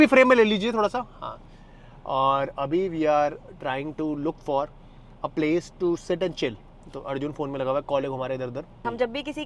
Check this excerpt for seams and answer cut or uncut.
uncut